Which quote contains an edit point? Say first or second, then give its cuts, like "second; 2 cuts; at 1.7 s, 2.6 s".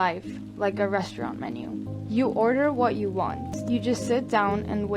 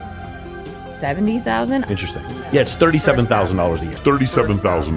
first; 2 cuts; at 1.9 s, 3.5 s